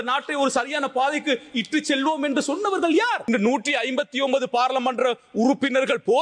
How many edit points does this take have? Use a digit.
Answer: 1